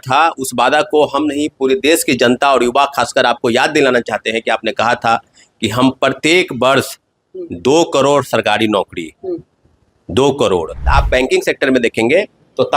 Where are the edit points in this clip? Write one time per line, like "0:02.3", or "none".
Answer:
0:10.9